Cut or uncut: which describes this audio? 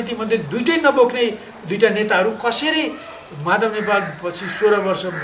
uncut